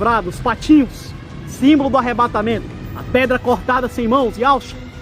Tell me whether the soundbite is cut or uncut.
cut